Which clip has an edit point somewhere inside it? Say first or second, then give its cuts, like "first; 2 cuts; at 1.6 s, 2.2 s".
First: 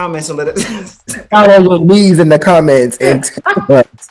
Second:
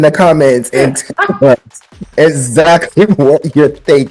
first; 1 cut; at 1.2 s